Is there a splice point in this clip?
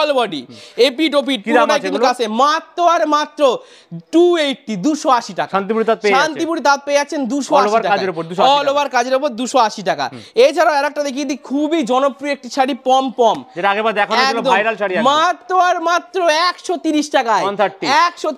no; 0 cuts

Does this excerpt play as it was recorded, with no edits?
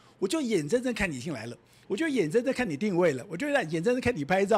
yes; 0 cuts

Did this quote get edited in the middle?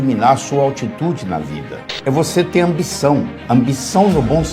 yes; 1 cut; at 2.0 s

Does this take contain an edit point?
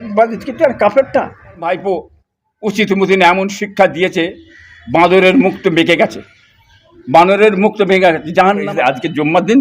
yes; 2 cuts; at 1.7 s, 8.7 s

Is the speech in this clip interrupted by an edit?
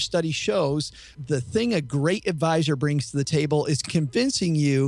yes; 2 cuts; at 1.2 s, 3.3 s

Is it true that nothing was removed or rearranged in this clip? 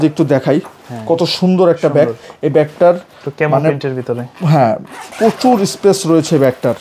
yes; 0 cuts

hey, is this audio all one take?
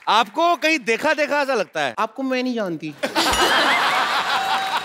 no; 1 cut; at 1.9 s

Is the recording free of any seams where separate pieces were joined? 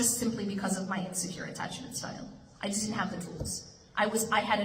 yes; 0 cuts

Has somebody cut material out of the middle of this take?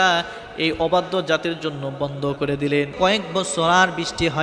yes; 1 cut; at 2.9 s

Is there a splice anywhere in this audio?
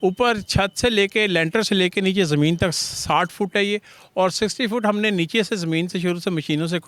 no; 0 cuts

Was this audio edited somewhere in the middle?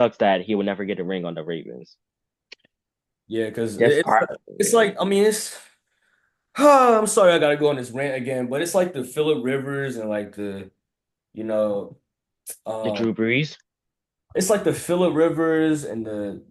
no; 0 cuts

